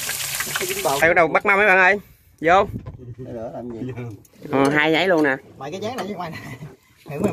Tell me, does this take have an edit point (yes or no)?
yes